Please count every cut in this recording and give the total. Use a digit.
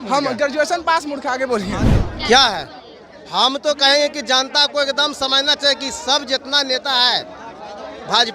1